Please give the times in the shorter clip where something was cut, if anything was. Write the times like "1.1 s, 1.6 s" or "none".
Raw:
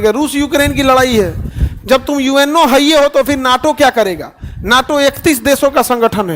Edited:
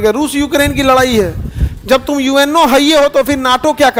none